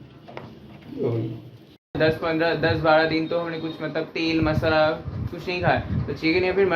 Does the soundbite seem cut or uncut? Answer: cut